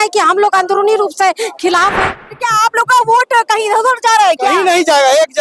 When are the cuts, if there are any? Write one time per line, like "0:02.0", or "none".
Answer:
0:02.2